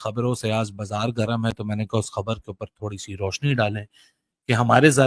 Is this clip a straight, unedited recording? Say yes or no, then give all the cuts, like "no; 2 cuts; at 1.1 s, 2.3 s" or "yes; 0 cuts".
yes; 0 cuts